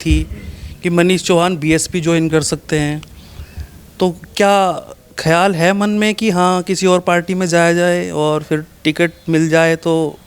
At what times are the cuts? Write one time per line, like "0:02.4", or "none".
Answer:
none